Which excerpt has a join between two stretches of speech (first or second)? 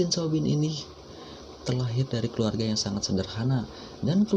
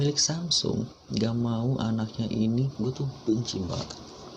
second